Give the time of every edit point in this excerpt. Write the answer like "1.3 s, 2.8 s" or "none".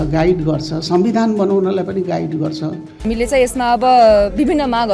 3.0 s